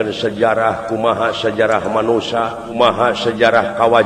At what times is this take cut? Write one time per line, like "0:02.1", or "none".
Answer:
0:02.7